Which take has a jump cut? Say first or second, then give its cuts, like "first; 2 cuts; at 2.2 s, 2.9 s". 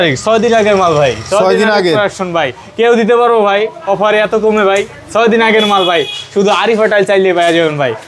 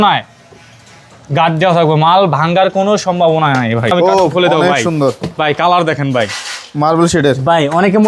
second; 1 cut; at 3.9 s